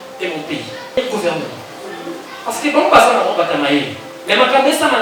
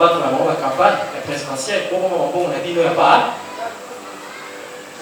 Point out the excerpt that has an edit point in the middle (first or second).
first